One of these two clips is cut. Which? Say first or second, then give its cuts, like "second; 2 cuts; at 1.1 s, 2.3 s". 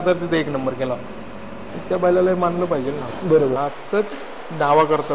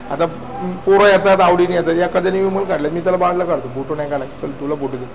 first; 1 cut; at 3.6 s